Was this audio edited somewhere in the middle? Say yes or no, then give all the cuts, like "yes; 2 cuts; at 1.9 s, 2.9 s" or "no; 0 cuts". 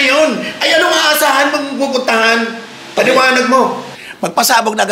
yes; 1 cut; at 3.8 s